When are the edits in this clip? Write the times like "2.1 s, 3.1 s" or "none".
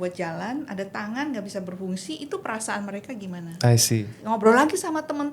4.1 s